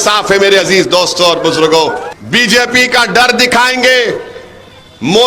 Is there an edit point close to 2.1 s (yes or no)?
yes